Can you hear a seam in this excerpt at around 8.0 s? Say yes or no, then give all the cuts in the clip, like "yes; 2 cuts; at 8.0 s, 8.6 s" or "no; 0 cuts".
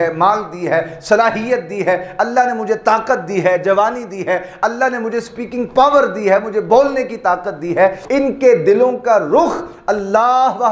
yes; 1 cut; at 8.0 s